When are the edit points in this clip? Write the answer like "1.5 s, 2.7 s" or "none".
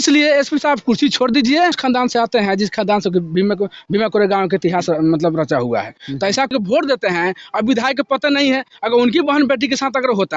1.8 s, 6.5 s

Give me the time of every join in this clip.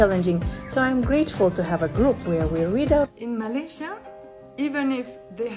3.1 s

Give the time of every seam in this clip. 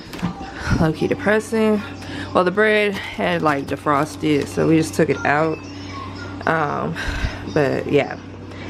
none

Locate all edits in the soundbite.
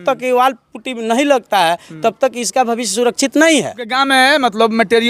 3.9 s

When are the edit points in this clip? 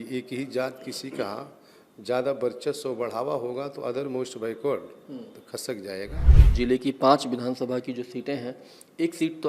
6.4 s

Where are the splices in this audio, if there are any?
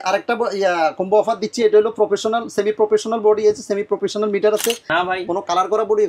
4.8 s

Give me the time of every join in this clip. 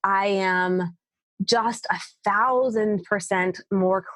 none

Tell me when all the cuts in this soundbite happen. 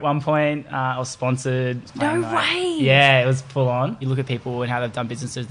4.1 s

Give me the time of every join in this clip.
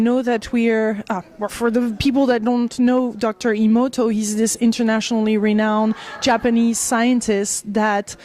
2.9 s

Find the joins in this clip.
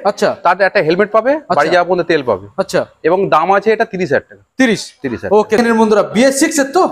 5.6 s

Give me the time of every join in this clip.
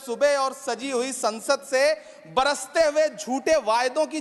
none

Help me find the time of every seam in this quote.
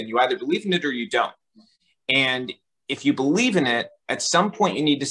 none

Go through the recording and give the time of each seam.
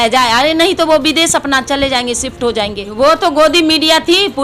2.9 s

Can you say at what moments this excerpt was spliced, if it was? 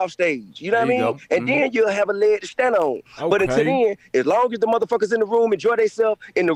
none

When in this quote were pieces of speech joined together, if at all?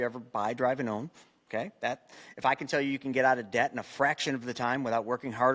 none

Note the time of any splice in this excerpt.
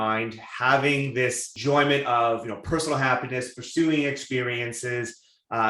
1.5 s

